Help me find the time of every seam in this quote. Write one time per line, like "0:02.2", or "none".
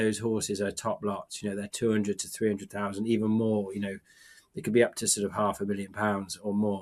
none